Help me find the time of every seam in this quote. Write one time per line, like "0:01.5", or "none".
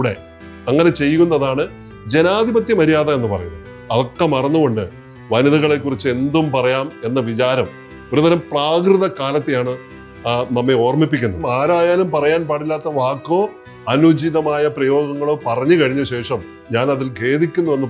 0:11.4
0:16.6